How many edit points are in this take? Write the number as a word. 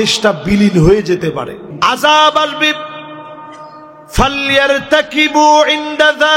one